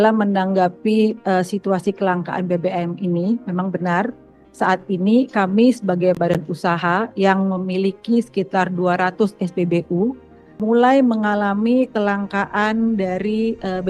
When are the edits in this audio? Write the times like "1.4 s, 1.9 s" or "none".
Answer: 10.6 s